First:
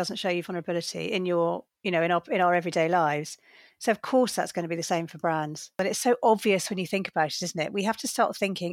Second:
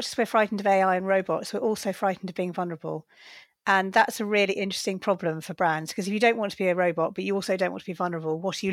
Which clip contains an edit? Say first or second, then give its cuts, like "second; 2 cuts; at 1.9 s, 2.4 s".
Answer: first; 2 cuts; at 1.7 s, 5.8 s